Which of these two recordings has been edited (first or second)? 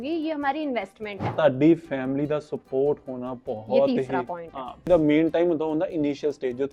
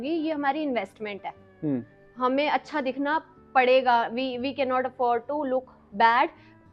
first